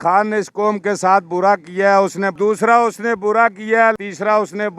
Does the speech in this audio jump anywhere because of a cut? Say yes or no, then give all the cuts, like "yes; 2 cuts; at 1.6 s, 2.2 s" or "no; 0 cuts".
yes; 2 cuts; at 2.3 s, 4.0 s